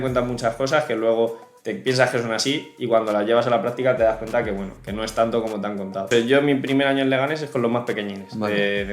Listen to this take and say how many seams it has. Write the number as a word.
one